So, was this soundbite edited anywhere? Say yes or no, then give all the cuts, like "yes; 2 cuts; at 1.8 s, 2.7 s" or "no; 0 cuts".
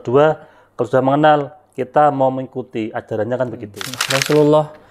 yes; 1 cut; at 3.9 s